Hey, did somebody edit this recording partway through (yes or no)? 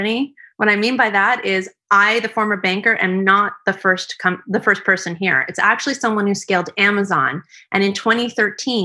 no